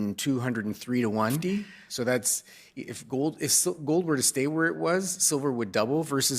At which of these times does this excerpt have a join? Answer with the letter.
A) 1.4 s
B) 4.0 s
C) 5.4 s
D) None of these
A